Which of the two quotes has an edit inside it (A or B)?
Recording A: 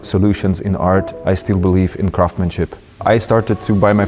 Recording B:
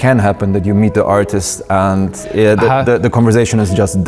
A